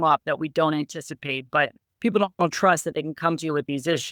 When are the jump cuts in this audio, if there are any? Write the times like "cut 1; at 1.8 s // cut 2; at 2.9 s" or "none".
cut 1; at 1.8 s